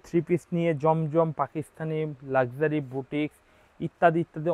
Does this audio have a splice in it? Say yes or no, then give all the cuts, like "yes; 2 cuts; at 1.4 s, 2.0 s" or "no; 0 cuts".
no; 0 cuts